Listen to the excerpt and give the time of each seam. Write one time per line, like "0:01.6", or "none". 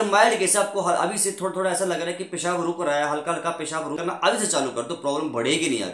0:04.0